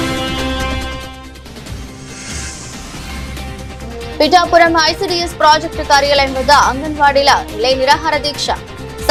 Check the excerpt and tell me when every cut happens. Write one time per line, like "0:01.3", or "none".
none